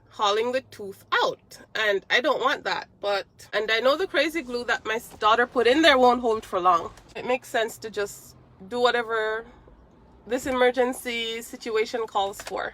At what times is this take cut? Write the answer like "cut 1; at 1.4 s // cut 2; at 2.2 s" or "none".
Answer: cut 1; at 3.4 s // cut 2; at 7.2 s